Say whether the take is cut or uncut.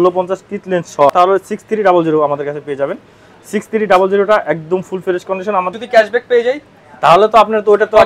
cut